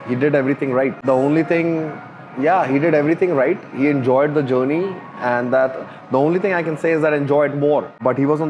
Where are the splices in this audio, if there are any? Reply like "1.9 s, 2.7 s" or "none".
none